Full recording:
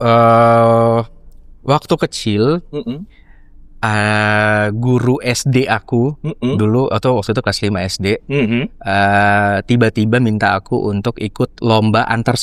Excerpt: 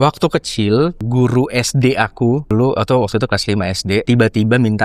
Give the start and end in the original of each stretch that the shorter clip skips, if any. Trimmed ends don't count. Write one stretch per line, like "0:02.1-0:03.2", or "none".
0:02.7-0:04.7
0:06.2-0:06.6
0:08.2-0:09.7